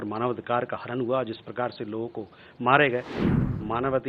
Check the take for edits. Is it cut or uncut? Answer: cut